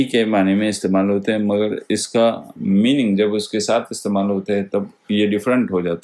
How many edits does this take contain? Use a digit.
0